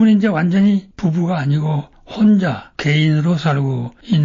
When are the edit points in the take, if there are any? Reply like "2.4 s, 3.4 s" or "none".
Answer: none

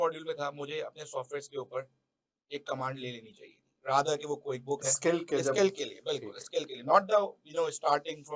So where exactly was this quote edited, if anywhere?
none

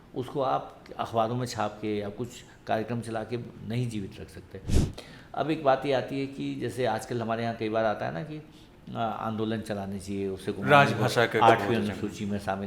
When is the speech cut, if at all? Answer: 4.7 s

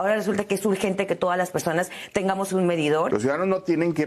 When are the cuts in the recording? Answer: 3.1 s

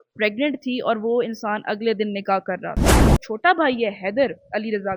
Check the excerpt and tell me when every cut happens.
3.1 s

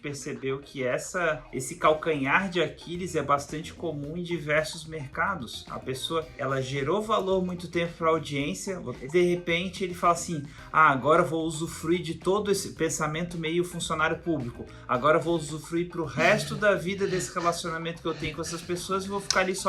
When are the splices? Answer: 1.5 s, 6.3 s, 8.9 s

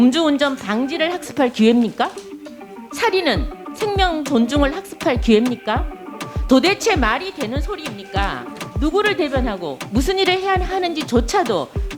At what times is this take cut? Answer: 8.6 s

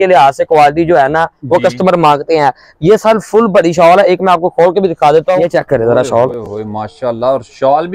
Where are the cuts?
5.4 s

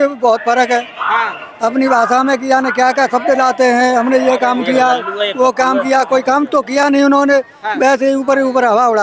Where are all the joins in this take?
none

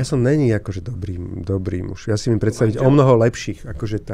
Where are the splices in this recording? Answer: none

